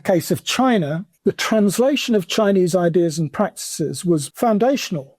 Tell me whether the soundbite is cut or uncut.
cut